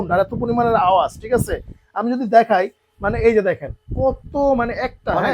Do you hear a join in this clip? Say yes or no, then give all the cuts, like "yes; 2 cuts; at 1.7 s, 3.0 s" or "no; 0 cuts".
no; 0 cuts